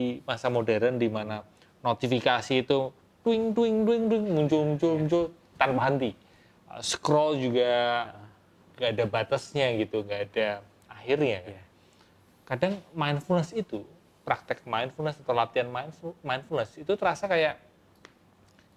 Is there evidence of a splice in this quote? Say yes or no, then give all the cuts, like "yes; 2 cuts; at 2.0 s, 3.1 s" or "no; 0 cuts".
no; 0 cuts